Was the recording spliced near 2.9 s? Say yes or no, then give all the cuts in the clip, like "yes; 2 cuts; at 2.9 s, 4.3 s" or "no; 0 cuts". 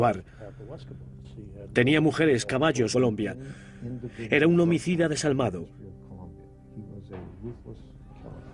no; 0 cuts